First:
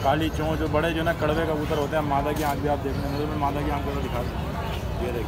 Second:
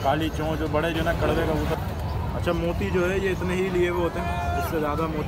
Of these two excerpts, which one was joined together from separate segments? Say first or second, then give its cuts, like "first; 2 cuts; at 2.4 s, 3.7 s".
second; 1 cut; at 1.7 s